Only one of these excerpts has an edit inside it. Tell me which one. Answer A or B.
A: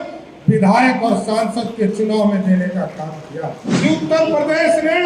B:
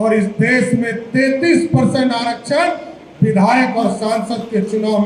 A